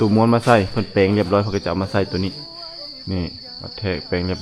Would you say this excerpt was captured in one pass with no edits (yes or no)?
yes